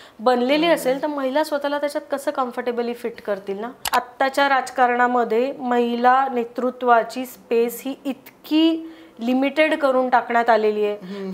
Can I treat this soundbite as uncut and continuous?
no; 1 cut; at 3.8 s

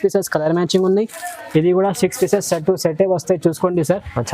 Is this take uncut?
yes; 0 cuts

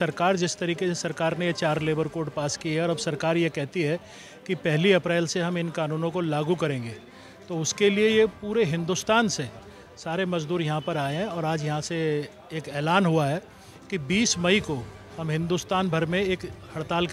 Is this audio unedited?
yes; 0 cuts

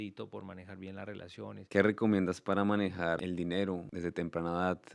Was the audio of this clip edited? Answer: yes; 3 cuts; at 1.6 s, 3.2 s, 3.9 s

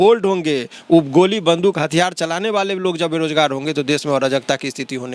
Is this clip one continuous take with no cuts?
yes; 0 cuts

